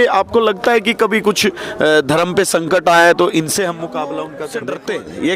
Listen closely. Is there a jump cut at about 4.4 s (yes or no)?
yes